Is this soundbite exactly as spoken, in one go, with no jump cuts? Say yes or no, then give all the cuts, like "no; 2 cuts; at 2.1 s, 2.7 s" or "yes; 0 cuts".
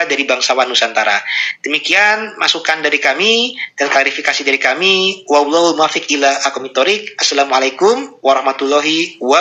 yes; 0 cuts